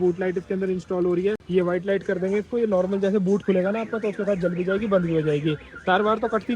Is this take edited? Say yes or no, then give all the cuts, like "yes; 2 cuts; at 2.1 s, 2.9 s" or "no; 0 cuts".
no; 0 cuts